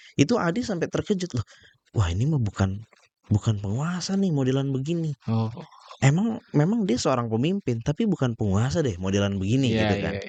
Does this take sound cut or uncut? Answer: uncut